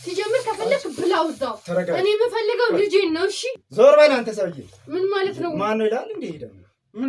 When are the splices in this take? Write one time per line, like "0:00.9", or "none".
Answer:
0:03.5